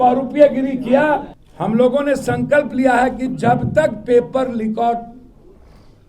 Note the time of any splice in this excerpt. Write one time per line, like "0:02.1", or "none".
0:01.3